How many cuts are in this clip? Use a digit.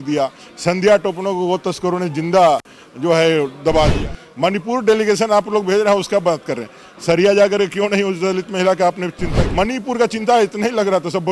2